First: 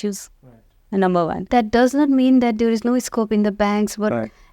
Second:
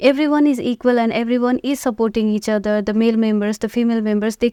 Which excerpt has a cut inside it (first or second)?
first